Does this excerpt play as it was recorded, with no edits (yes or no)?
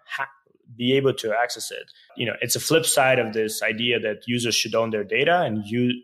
no